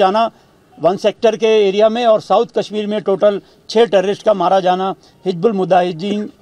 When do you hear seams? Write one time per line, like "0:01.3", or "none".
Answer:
none

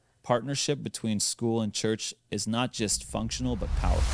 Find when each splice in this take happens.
none

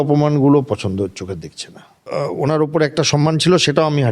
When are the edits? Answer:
0:02.0

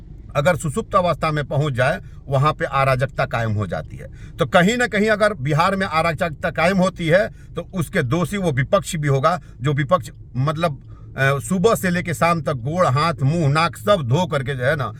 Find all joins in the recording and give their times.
none

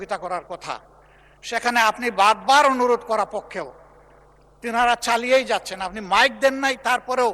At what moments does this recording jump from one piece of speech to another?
none

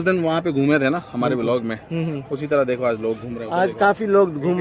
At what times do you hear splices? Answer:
none

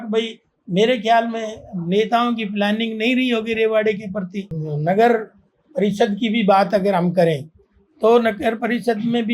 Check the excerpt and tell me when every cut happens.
0:04.4

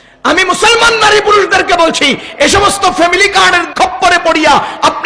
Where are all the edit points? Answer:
0:03.7

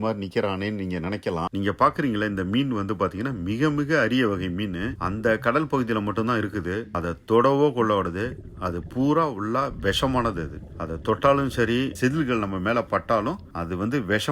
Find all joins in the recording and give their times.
0:01.5

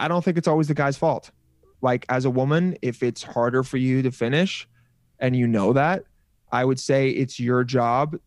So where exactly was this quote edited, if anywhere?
0:01.7

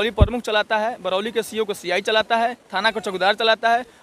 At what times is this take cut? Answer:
none

